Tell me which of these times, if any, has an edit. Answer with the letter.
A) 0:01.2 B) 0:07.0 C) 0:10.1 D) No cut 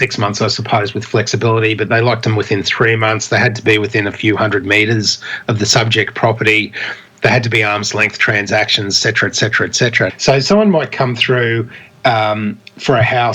C